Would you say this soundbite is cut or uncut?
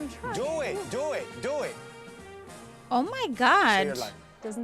uncut